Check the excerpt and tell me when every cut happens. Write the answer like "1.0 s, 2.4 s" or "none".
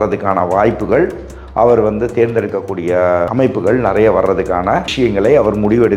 3.3 s, 4.9 s